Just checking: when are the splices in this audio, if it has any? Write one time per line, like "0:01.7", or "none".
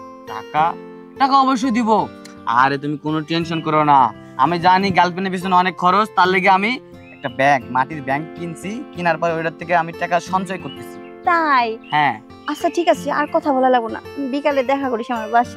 0:12.3

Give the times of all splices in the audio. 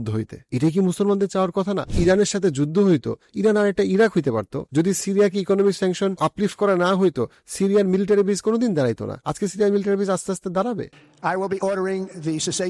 0:01.9
0:04.6
0:06.1
0:10.9

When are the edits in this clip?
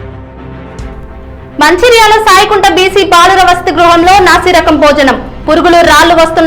0:01.2

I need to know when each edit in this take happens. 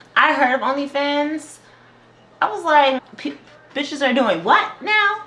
0:03.1

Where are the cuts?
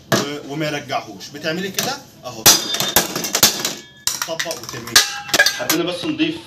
0:05.5

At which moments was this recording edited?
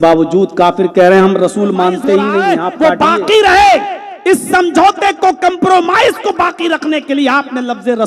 0:02.7

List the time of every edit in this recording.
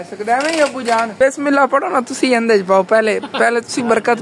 0:01.2

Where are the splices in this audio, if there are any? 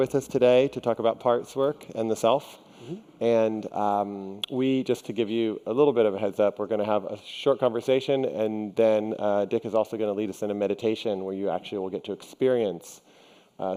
none

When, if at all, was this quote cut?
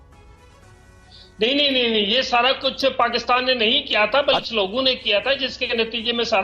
none

